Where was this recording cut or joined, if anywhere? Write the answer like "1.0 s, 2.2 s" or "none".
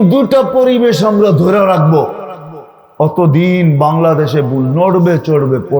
none